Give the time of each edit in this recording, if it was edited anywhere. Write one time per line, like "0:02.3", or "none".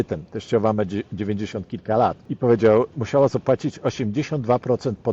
0:02.3
0:02.9